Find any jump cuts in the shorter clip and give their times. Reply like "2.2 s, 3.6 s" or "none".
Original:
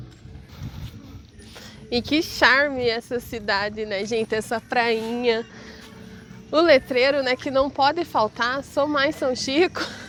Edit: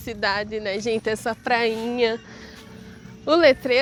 none

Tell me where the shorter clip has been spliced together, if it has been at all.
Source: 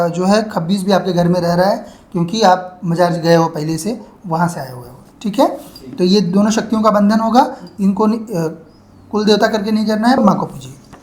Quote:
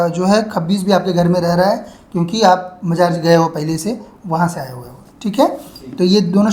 none

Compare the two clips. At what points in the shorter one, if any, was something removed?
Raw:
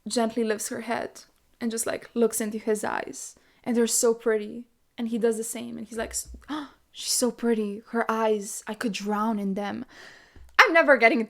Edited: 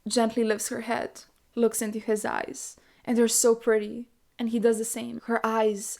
1.4 s, 5.2 s

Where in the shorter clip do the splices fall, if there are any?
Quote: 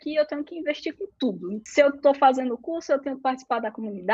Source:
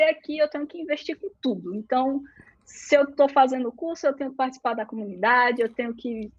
1.5 s

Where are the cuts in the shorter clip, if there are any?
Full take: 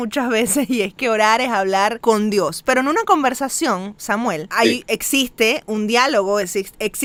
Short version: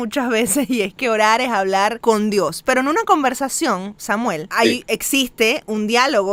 none

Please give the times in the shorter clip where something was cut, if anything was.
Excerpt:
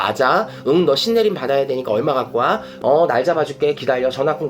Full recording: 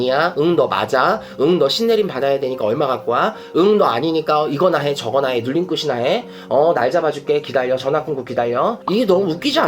2.7 s

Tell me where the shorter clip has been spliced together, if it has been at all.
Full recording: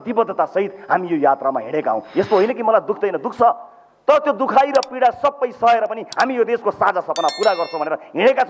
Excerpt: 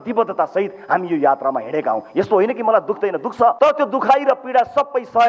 3.5 s

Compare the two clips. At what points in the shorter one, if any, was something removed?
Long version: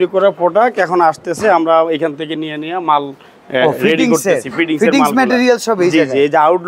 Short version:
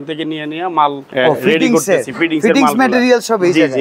1.0 s

